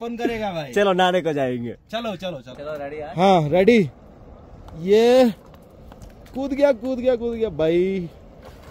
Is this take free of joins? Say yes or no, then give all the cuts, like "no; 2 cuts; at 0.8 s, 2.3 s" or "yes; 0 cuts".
no; 1 cut; at 2.5 s